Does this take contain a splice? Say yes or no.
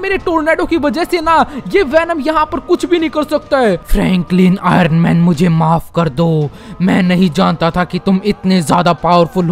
yes